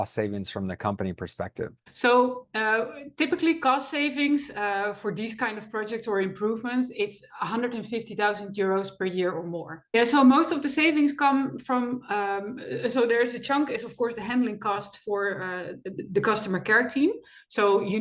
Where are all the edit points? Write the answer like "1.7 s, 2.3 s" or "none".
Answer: 1.8 s, 9.9 s